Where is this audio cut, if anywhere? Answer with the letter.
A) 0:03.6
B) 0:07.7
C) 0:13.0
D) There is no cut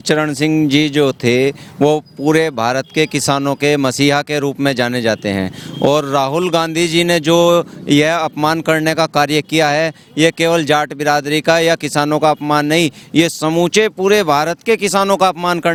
D